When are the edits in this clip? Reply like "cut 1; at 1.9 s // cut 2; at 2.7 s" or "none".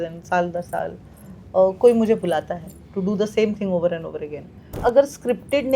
cut 1; at 4.7 s